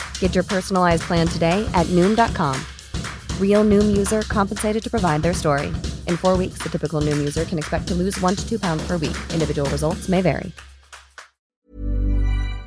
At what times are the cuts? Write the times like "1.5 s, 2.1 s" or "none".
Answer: 11.5 s